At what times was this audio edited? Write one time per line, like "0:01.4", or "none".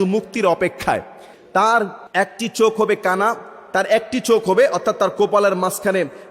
0:01.3
0:02.0